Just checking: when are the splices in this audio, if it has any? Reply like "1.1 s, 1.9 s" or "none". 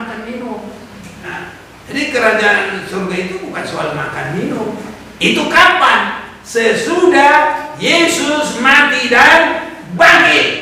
1.3 s